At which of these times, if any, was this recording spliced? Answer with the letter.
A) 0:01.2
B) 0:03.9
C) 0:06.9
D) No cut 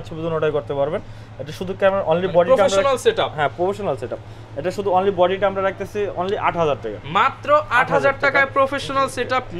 D